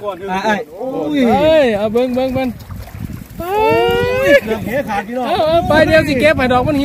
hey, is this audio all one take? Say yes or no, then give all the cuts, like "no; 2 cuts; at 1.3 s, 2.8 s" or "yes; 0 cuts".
yes; 0 cuts